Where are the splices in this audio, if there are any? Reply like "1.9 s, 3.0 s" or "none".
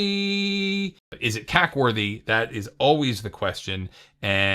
1.1 s